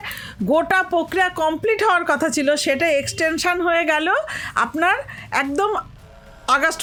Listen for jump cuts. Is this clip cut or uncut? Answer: uncut